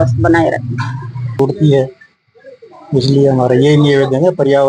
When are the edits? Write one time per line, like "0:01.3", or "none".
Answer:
0:01.4